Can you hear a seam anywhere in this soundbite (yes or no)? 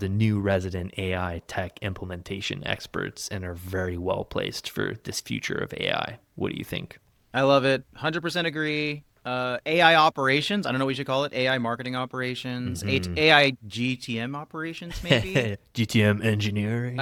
no